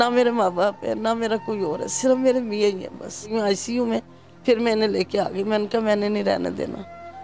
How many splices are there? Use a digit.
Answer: 1